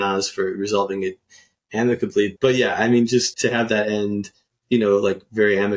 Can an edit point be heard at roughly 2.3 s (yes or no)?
yes